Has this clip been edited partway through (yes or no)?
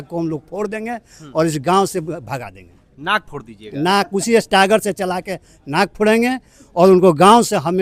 no